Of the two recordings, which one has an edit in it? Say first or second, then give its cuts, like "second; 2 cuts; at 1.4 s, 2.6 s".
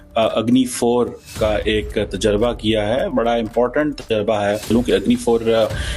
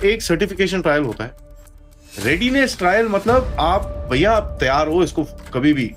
first; 1 cut; at 4.7 s